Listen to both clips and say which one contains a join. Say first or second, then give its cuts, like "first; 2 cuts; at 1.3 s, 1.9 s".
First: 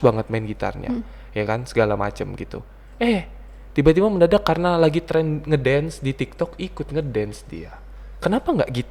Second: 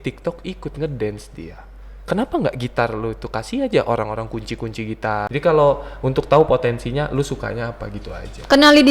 second; 1 cut; at 5.3 s